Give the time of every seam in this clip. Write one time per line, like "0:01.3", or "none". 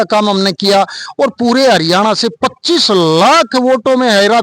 none